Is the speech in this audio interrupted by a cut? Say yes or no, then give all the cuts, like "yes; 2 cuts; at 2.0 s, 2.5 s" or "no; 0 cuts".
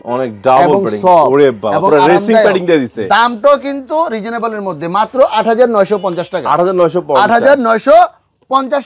no; 0 cuts